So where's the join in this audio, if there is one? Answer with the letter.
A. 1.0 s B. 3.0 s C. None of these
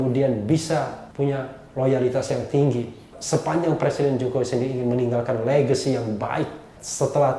A